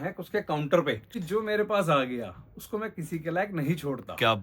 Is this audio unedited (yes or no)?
no